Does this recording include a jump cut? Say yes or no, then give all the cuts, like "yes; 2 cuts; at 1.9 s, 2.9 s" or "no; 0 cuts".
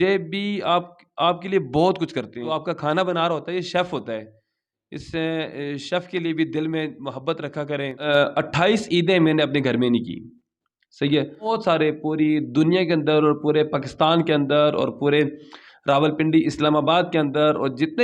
yes; 3 cuts; at 2.5 s, 8.0 s, 11.5 s